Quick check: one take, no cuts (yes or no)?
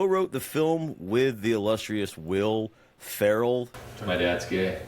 no